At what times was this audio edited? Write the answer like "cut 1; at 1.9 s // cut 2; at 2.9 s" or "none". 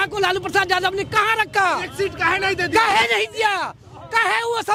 none

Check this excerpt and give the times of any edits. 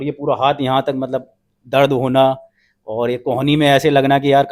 none

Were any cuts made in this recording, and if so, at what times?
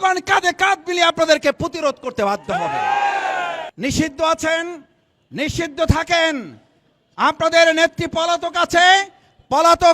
cut 1; at 3.7 s

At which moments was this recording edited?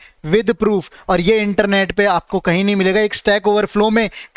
none

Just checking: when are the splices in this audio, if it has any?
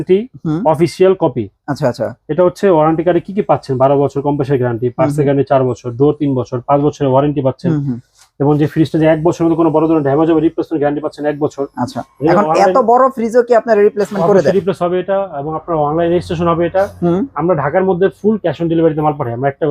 none

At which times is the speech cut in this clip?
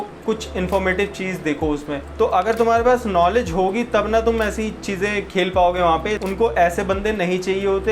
cut 1; at 2.0 s // cut 2; at 6.2 s

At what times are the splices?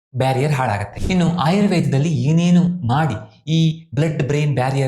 cut 1; at 0.9 s

